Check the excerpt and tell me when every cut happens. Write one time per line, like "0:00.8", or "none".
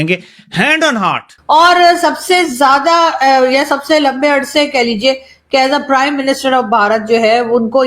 0:01.3